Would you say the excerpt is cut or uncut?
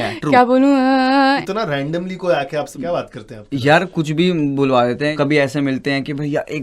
cut